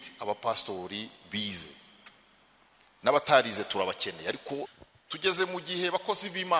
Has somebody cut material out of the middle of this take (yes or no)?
yes